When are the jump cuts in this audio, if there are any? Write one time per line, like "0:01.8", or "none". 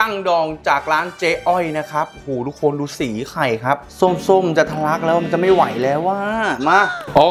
none

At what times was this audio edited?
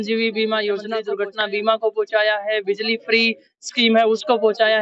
0:01.0

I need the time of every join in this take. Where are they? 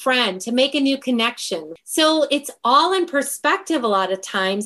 0:01.7

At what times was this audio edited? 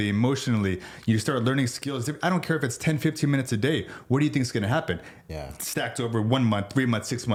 none

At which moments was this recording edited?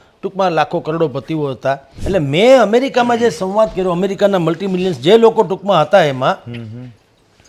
0:01.9

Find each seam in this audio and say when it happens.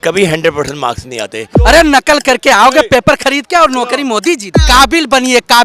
0:01.4
0:04.5

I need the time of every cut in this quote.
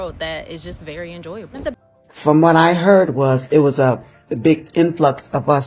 0:01.7

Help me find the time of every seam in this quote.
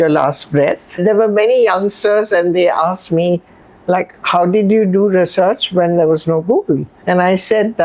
0:00.9
0:06.9

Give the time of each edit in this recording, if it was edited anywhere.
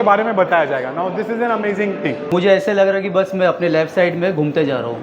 0:02.3

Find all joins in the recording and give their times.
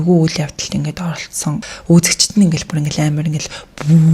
0:01.7

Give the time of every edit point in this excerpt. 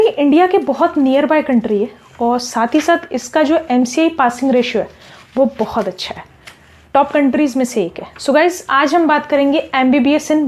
none

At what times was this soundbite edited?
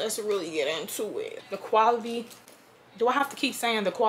0:01.3

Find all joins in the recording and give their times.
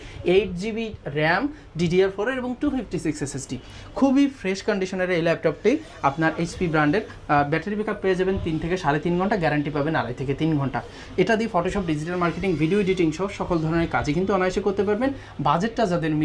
none

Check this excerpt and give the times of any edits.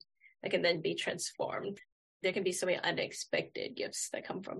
0:01.7

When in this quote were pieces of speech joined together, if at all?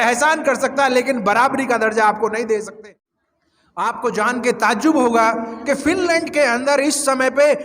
0:02.7

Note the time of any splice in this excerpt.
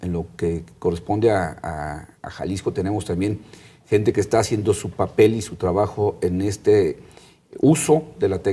0:05.3

